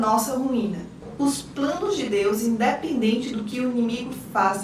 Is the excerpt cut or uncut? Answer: cut